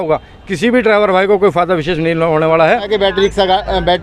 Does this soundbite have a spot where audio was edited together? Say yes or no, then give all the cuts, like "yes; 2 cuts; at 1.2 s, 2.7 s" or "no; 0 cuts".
yes; 1 cut; at 2.9 s